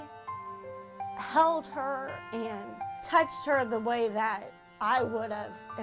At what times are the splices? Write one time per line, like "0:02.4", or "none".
none